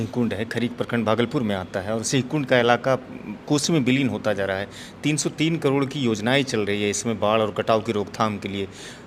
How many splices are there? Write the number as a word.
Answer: zero